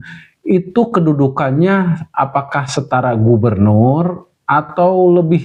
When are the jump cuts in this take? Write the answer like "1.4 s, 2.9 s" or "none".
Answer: none